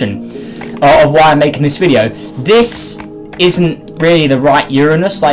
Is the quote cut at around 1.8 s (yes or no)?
no